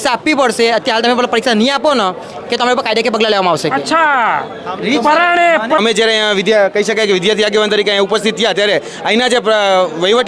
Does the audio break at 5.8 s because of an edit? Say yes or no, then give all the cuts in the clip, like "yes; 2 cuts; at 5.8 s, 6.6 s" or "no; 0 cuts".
yes; 1 cut; at 5.8 s